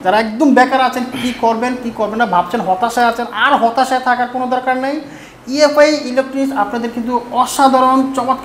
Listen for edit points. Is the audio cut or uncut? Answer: uncut